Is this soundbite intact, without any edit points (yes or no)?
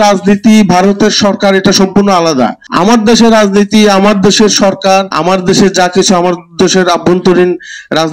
no